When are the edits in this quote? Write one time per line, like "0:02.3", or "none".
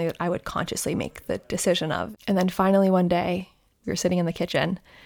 0:02.1
0:03.7